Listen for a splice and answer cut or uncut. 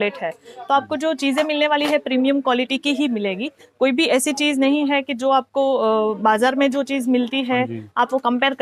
uncut